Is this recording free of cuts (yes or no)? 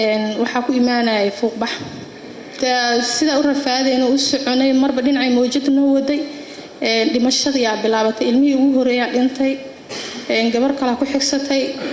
no